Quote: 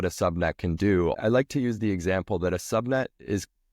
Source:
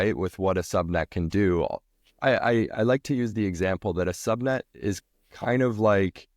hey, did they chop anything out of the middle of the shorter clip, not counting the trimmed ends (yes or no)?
yes